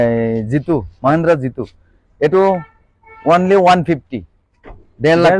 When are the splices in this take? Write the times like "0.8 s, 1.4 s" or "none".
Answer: none